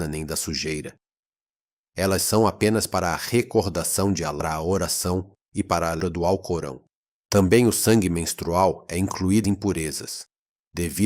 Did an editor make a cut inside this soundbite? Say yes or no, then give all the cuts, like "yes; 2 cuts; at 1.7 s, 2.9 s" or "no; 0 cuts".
yes; 3 cuts; at 4.4 s, 6.0 s, 9.4 s